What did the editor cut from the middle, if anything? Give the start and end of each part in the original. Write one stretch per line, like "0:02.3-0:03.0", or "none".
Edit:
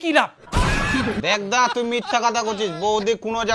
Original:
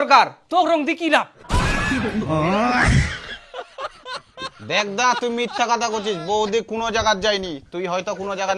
0:02.1-0:04.6